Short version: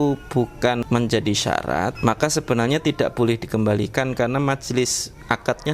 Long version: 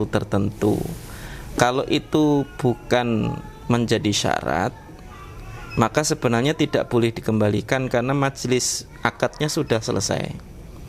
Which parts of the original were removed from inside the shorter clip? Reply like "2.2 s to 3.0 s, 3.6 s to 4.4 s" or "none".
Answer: 3.1 s to 3.6 s, 4.7 s to 5.7 s